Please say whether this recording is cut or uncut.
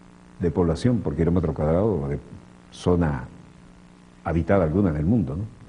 cut